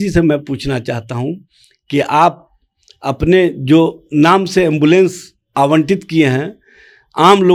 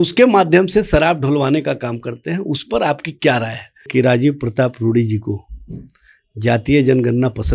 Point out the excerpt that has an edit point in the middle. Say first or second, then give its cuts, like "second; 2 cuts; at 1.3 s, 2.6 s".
second; 1 cut; at 3.9 s